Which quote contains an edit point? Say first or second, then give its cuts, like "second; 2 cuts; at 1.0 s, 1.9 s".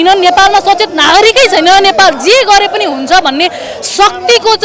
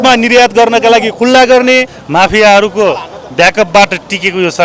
second; 1 cut; at 2.0 s